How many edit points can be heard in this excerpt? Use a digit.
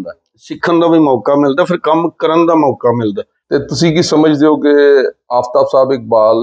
1